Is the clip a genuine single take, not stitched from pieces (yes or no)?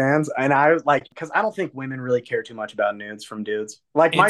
no